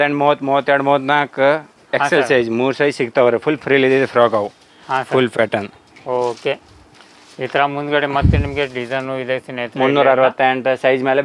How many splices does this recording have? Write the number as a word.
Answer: zero